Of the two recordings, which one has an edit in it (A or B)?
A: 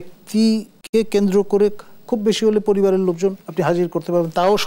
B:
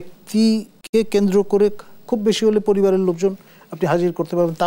A